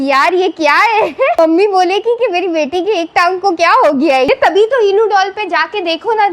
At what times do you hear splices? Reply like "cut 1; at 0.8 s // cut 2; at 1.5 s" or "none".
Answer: cut 1; at 1.4 s // cut 2; at 4.3 s